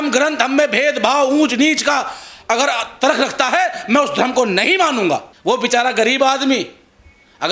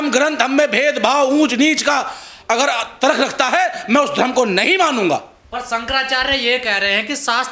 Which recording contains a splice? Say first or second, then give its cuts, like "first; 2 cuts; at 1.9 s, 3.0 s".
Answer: first; 1 cut; at 5.3 s